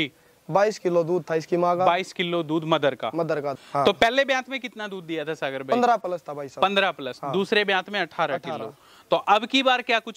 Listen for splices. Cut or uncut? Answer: cut